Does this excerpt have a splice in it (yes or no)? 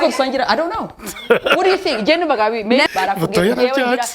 yes